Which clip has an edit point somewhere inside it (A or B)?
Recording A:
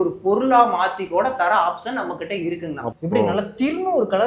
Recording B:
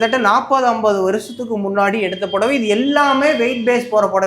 A